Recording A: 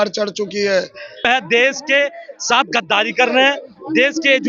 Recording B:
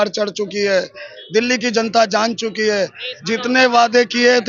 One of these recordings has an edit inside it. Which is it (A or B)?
A